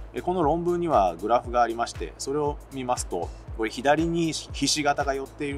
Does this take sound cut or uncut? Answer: cut